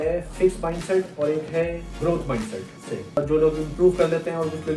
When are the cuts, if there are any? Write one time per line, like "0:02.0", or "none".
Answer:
0:02.8